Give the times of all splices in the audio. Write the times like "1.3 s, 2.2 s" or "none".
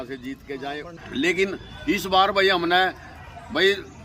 0.9 s